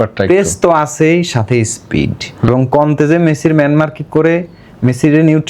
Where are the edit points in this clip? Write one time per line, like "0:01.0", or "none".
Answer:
0:02.5